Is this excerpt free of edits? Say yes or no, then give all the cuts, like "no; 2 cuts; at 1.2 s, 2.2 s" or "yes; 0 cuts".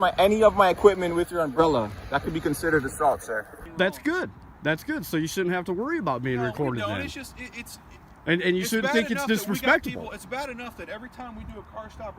no; 1 cut; at 3.5 s